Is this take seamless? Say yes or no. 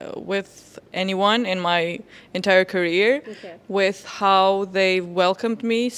yes